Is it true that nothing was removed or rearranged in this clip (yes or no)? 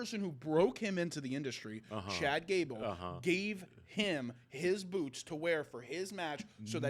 yes